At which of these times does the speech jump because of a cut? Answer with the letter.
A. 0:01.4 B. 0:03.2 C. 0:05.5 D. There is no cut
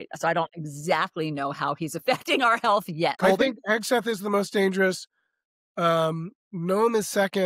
B